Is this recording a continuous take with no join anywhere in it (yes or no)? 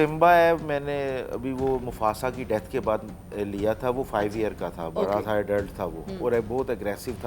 yes